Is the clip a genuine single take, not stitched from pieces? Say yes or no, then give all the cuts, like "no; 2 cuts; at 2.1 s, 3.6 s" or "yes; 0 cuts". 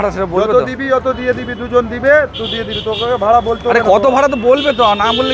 yes; 0 cuts